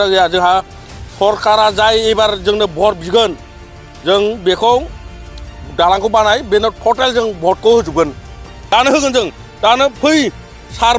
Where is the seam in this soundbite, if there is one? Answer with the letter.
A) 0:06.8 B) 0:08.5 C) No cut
B